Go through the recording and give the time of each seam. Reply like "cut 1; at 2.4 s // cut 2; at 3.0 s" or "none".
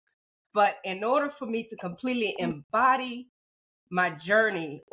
none